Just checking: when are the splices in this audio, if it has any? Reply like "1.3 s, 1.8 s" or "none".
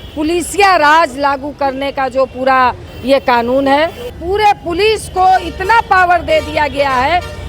4.2 s